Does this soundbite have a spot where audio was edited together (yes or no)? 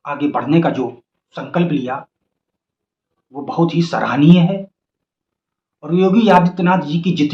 no